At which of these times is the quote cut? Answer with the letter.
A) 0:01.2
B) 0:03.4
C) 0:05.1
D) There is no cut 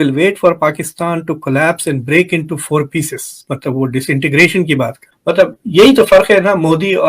C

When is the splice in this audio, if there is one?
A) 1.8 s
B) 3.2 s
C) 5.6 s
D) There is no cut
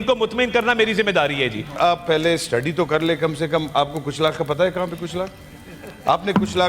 A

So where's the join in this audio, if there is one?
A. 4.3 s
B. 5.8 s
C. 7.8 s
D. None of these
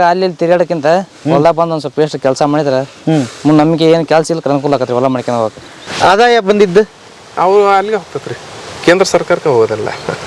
B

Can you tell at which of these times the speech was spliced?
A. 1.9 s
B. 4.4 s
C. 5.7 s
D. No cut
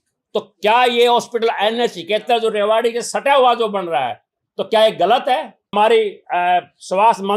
C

